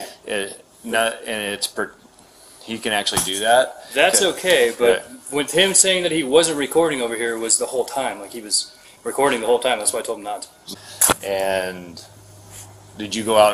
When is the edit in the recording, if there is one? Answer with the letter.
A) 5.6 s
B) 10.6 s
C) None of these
B